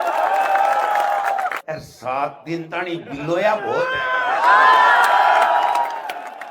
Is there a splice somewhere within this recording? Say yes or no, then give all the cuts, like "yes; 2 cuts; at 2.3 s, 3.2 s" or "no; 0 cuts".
yes; 1 cut; at 1.6 s